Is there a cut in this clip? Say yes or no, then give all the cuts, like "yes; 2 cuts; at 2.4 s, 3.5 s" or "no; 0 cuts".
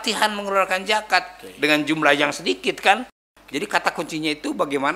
yes; 1 cut; at 3.2 s